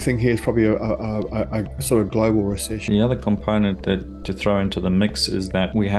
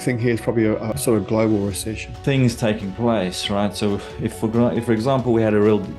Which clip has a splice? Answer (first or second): second